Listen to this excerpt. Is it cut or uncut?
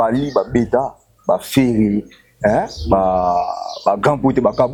uncut